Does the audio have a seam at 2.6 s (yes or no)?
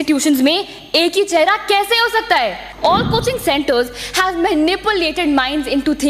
yes